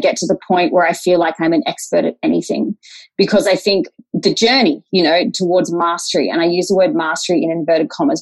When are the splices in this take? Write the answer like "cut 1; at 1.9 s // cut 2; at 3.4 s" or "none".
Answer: cut 1; at 4.0 s // cut 2; at 5.3 s